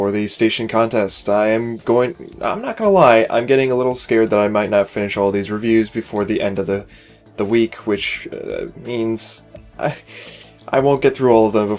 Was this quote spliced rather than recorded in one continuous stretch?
yes; 1 cut; at 6.3 s

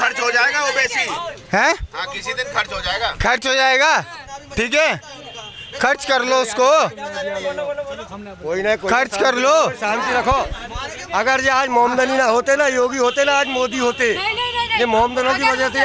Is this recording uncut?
yes; 0 cuts

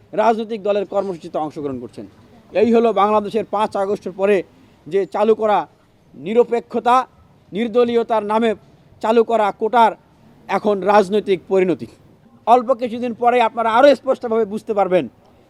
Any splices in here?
yes; 1 cut; at 12.3 s

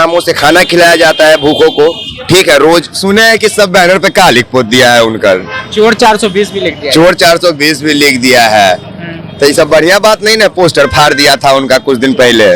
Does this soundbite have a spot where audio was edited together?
yes; 1 cut; at 2.9 s

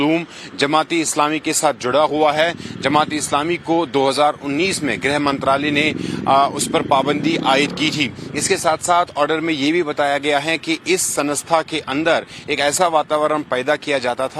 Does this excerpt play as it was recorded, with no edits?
no; 1 cut; at 7.2 s

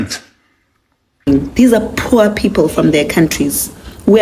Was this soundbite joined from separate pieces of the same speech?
yes; 1 cut; at 1.3 s

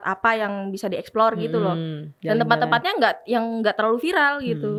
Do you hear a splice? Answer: no; 0 cuts

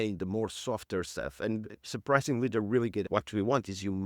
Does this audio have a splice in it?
yes; 1 cut; at 3.1 s

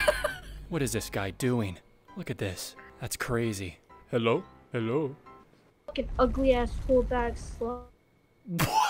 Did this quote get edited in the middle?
no; 0 cuts

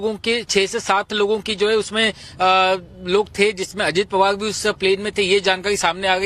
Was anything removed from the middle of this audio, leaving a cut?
no; 0 cuts

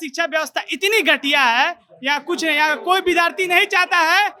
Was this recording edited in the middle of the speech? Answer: no; 0 cuts

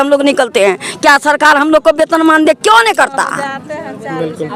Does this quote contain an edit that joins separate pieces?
no; 0 cuts

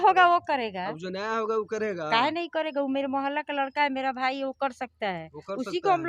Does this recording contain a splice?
no; 0 cuts

